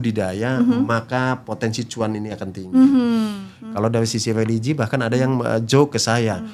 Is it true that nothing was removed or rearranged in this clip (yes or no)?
no